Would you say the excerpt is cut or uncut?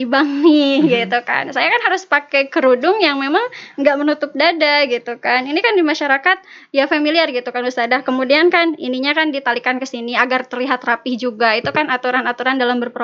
uncut